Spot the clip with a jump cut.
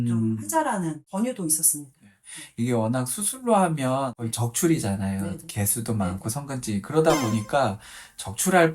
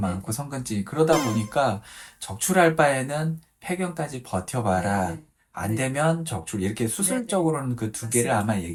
first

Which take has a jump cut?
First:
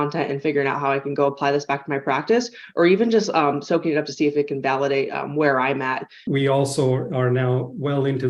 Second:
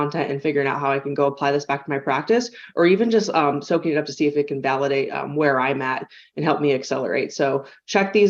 first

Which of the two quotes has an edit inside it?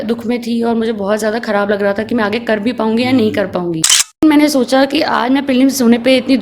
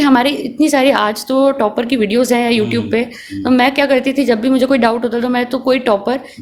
first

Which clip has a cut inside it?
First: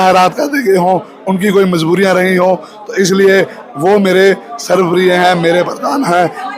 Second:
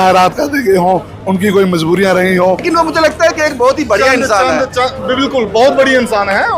second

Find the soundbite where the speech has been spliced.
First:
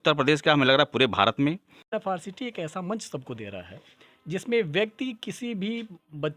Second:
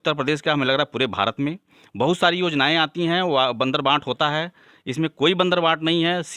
first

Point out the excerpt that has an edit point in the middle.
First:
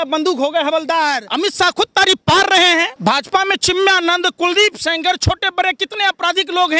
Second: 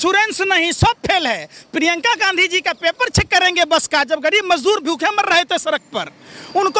first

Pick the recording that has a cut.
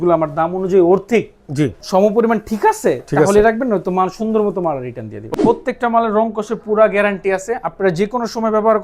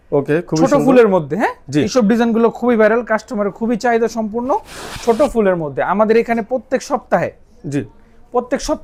first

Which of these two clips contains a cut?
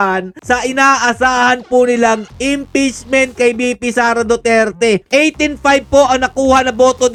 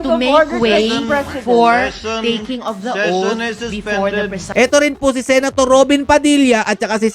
second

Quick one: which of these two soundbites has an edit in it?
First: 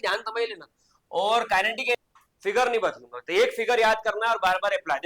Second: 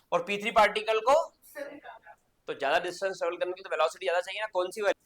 first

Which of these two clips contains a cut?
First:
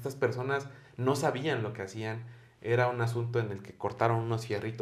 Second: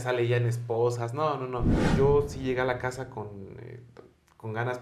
second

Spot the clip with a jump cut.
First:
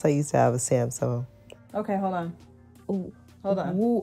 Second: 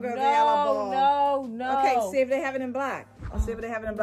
first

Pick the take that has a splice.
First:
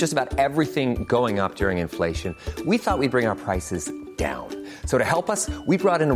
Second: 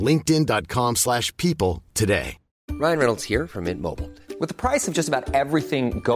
second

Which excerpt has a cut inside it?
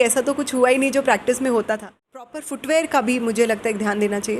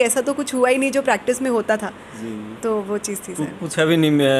first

